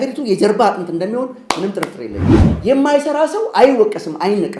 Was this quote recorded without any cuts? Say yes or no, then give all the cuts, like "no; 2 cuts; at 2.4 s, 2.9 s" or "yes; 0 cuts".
no; 1 cut; at 2.4 s